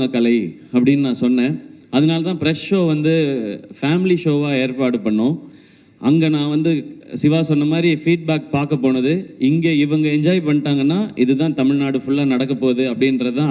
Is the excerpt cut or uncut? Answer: uncut